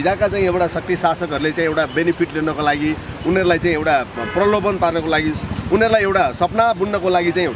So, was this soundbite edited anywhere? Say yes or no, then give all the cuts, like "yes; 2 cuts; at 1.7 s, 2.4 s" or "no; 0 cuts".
no; 0 cuts